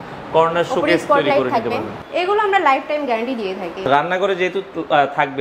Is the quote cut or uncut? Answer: cut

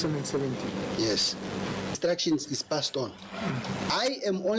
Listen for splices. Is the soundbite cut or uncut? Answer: cut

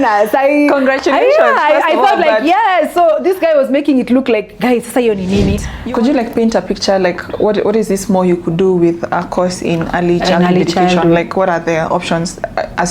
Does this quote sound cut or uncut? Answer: cut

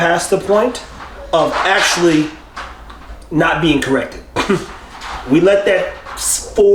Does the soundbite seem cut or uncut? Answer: uncut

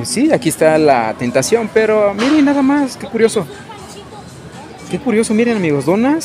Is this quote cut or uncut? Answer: uncut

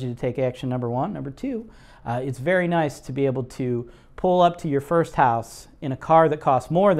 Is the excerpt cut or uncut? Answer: uncut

